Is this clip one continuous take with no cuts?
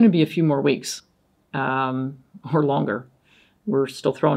yes; 0 cuts

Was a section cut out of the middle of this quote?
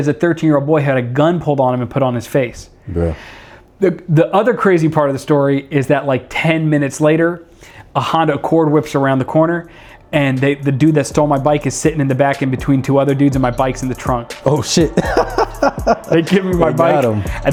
no; 0 cuts

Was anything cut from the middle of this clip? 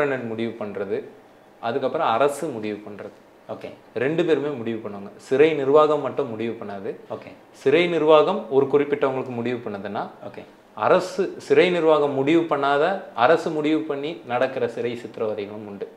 no; 0 cuts

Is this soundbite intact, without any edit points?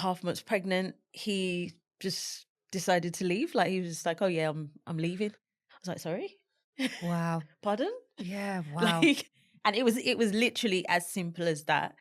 yes; 0 cuts

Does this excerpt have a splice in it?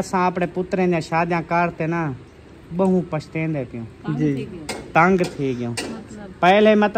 no; 0 cuts

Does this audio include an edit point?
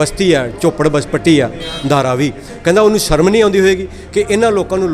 no; 0 cuts

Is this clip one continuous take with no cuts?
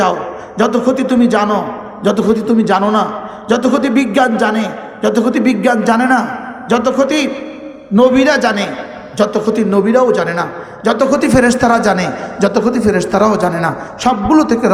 yes; 0 cuts

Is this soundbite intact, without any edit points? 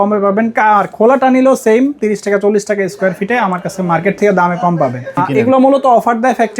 no; 1 cut; at 5.2 s

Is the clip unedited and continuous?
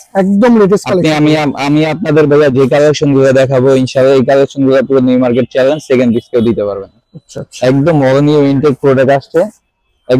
yes; 0 cuts

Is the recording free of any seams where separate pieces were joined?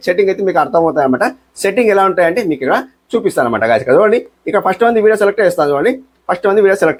yes; 0 cuts

